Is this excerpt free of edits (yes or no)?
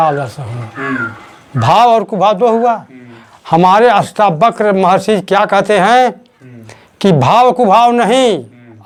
yes